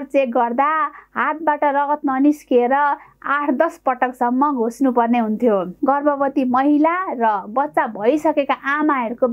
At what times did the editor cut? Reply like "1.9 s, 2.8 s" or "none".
5.7 s